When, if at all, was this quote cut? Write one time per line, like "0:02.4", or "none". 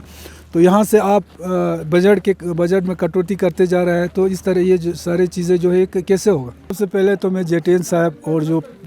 0:06.7